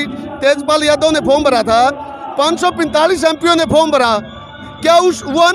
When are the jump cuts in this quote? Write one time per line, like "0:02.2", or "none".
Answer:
none